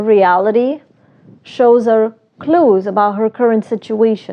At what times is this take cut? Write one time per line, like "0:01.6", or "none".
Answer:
none